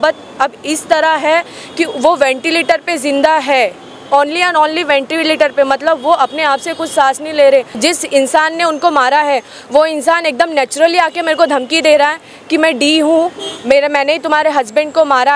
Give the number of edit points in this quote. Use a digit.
1